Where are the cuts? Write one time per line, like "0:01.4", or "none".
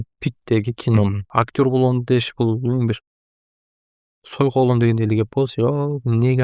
0:01.2